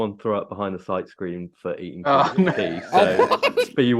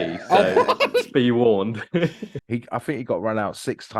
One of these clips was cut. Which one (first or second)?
second